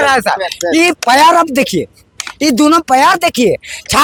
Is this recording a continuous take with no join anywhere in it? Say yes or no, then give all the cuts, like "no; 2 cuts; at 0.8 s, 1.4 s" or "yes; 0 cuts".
yes; 0 cuts